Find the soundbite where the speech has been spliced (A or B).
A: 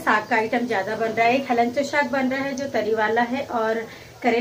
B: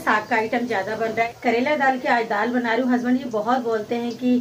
B